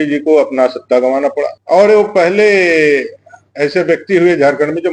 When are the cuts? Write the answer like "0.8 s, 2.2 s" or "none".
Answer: 1.6 s